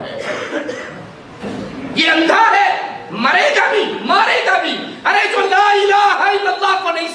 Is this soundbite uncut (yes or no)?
no